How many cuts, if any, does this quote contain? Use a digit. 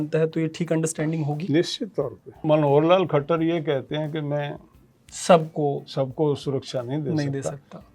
1